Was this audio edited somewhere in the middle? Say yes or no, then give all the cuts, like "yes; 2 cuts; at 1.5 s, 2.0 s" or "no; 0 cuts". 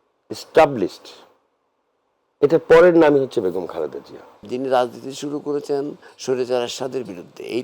yes; 1 cut; at 4.4 s